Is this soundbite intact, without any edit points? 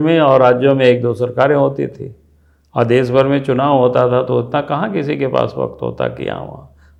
yes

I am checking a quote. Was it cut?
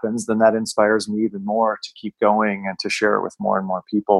no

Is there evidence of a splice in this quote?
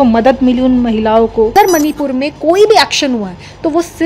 yes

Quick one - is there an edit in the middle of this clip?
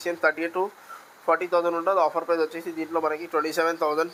no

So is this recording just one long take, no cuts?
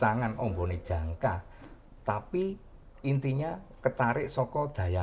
yes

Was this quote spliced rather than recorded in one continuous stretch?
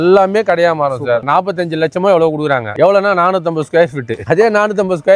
yes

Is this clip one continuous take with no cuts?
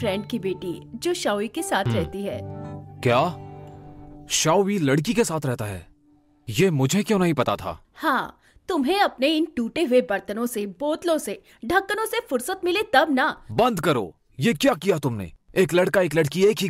yes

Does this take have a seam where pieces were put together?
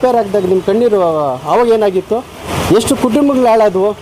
yes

